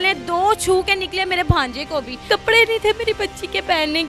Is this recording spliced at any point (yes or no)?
yes